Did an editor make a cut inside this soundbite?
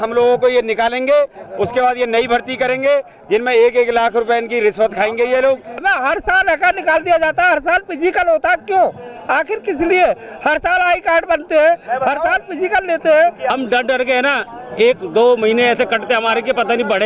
yes; 2 cuts; at 5.8 s, 13.5 s

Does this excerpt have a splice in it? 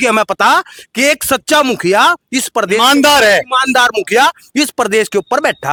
no; 0 cuts

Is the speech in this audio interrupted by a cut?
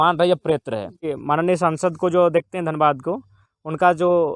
yes; 1 cut; at 1.1 s

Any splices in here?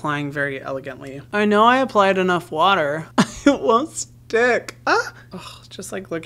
yes; 2 cuts; at 1.1 s, 3.0 s

